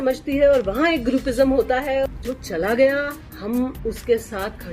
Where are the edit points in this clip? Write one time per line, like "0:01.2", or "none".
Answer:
0:02.0